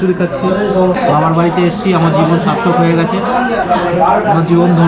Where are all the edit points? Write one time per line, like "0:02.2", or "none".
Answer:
0:00.9
0:03.6